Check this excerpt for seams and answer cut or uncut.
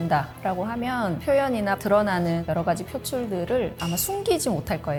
uncut